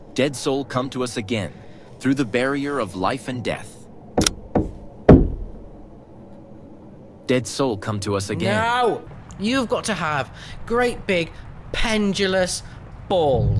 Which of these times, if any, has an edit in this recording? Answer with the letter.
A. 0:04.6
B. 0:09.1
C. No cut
B